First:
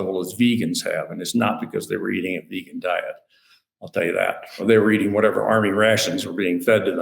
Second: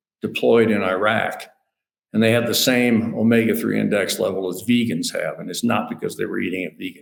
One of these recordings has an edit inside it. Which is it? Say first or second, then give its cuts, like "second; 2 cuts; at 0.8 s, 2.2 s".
first; 1 cut; at 4.5 s